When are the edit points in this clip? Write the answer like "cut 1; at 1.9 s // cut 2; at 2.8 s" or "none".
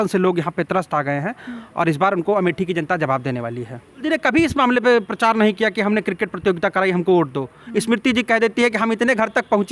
cut 1; at 4.0 s